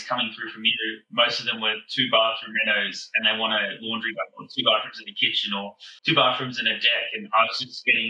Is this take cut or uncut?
uncut